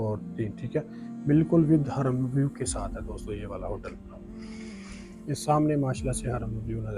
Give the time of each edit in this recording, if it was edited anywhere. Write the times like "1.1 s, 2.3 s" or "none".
none